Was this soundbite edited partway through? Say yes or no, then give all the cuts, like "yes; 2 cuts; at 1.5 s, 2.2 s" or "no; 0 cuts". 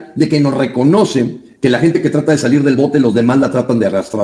no; 0 cuts